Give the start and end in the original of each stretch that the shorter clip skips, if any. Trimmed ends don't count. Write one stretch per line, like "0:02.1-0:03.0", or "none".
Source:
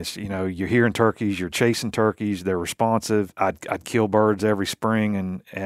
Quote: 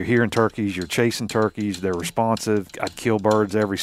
0:03.3-0:03.6